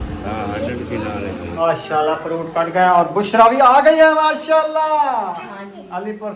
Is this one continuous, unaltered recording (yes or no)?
no